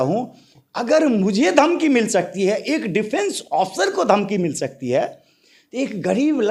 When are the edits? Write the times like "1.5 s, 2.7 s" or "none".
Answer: none

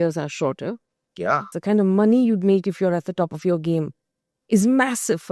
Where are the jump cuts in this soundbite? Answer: 1.5 s

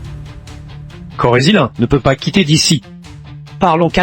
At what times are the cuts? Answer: 1.1 s

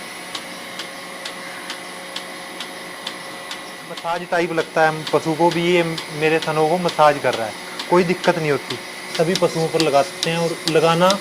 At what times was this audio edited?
4.0 s, 9.1 s

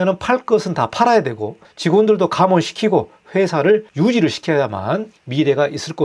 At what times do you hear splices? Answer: none

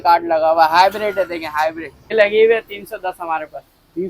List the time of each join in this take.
1.9 s

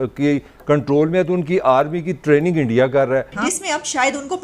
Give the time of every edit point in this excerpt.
3.3 s

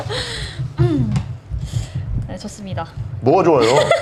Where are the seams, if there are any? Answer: none

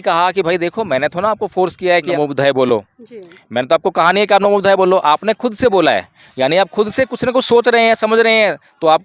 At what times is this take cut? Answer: 2.1 s

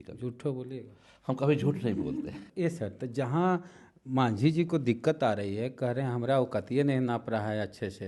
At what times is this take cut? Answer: 2.4 s

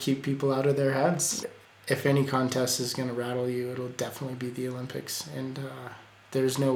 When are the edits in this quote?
1.4 s

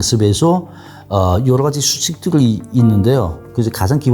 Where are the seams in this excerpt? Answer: none

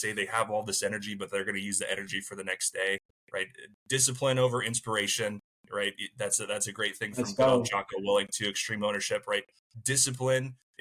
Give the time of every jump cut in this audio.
none

